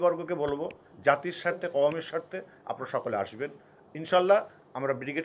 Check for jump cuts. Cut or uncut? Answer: uncut